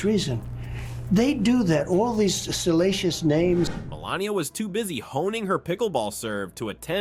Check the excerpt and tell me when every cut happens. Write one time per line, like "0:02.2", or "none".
none